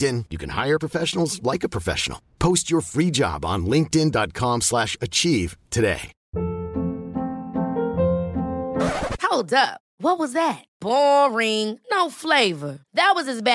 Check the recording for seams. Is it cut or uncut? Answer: uncut